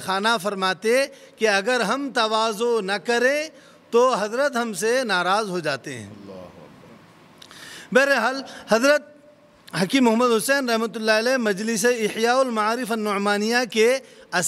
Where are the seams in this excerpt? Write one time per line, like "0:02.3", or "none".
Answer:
none